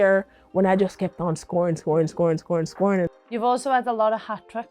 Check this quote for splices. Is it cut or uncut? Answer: cut